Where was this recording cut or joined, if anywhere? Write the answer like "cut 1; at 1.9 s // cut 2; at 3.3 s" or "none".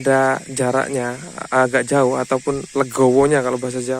none